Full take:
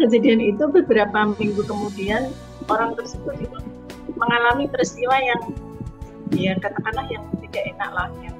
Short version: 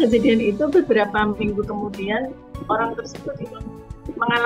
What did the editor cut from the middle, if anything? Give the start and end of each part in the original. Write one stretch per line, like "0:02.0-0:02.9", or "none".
none